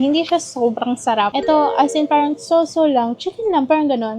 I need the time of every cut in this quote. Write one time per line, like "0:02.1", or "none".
0:01.3